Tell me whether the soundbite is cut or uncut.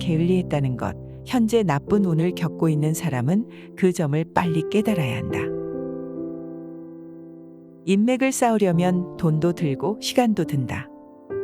cut